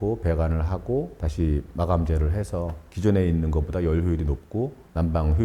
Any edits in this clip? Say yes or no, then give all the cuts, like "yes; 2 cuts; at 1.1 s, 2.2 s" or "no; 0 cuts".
no; 0 cuts